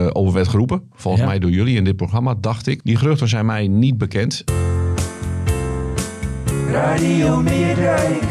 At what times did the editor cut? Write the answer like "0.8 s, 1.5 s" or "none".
2.8 s, 4.4 s